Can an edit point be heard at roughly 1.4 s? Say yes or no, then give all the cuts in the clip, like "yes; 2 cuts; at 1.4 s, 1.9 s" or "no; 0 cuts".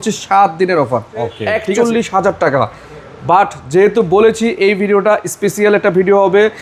yes; 1 cut; at 1.4 s